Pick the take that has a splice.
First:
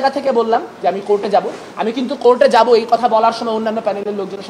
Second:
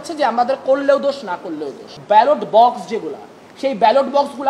second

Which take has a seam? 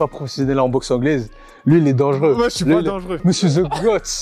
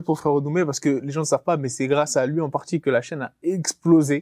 first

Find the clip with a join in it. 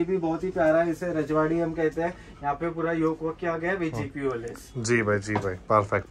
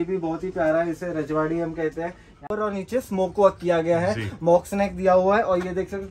second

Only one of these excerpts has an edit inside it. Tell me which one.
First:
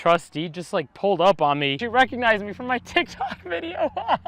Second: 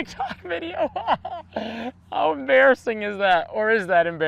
first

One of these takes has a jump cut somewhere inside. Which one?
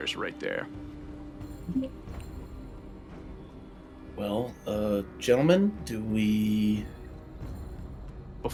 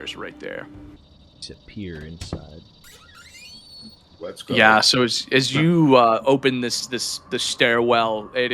second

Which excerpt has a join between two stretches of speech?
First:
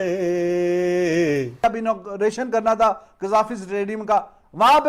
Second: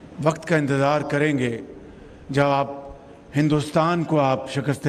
first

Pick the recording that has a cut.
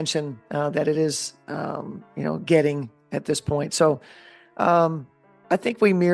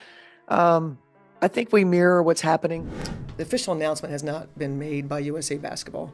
second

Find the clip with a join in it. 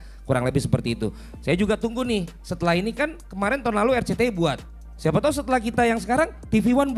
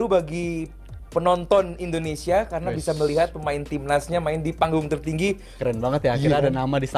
second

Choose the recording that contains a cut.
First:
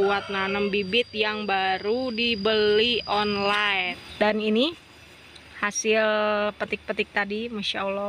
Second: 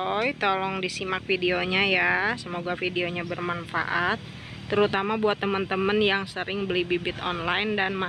first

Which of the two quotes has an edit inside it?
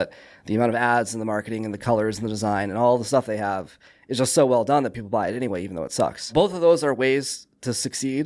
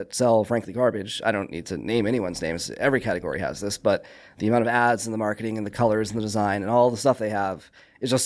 first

